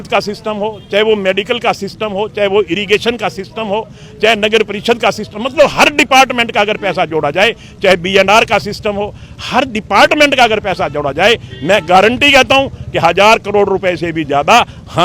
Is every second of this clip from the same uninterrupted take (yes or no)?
yes